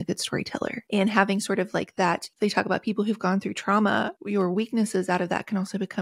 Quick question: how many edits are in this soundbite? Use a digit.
3